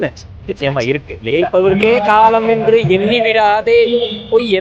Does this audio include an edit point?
no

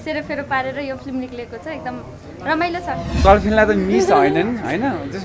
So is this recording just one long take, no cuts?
no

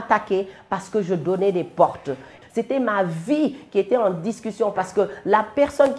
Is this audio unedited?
no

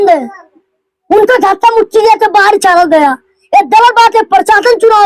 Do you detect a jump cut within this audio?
no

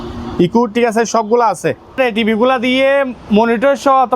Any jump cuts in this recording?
yes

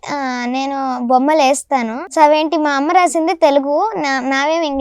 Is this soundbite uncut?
no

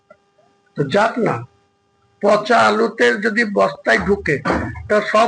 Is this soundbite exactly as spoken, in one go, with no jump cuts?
yes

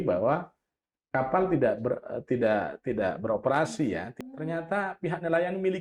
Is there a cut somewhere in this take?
yes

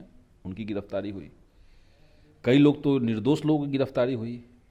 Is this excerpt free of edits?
yes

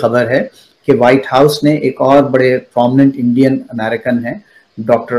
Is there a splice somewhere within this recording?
no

